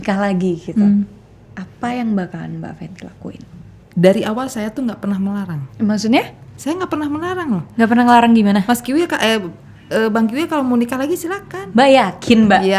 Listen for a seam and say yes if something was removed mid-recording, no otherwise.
no